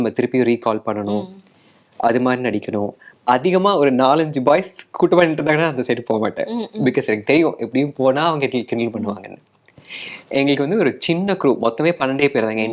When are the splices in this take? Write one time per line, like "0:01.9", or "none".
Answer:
0:03.0

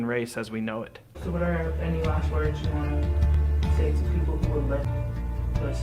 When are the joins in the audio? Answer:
0:01.1
0:04.9

